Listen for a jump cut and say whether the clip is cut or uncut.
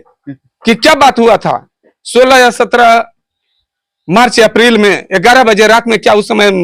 uncut